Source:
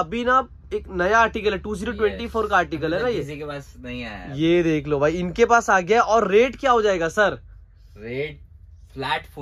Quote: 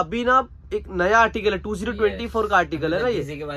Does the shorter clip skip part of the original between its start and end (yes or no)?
no